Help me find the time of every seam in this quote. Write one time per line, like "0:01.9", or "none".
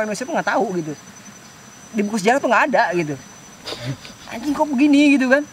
none